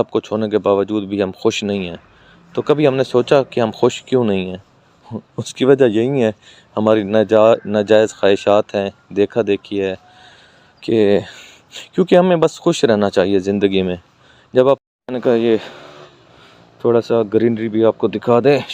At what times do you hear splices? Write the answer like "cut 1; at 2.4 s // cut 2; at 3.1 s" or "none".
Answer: cut 1; at 14.8 s